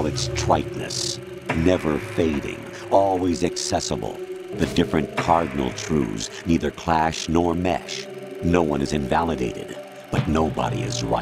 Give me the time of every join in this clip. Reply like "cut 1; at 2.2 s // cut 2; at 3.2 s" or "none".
cut 1; at 4.4 s